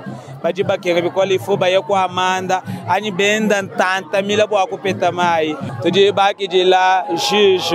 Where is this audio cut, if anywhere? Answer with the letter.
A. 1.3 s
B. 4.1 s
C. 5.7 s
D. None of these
C